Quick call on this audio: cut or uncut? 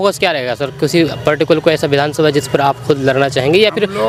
uncut